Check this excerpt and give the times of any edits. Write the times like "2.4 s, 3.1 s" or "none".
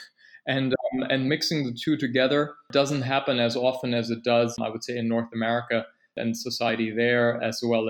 none